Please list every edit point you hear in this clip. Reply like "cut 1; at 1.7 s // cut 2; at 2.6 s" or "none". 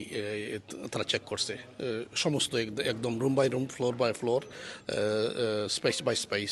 none